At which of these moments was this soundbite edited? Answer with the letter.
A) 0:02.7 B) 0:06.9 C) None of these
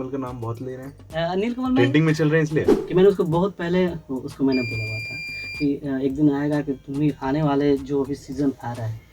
A